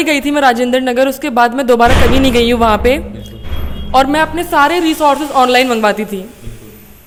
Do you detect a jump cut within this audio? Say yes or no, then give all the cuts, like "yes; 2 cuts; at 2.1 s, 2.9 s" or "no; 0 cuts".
no; 0 cuts